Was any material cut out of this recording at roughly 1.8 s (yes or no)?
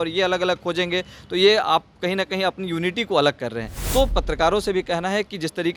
no